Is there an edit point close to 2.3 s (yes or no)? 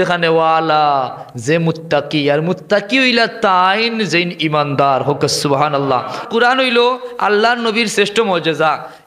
no